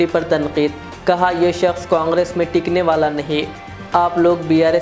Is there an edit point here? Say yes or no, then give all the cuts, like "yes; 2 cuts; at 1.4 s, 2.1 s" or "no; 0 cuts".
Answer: no; 0 cuts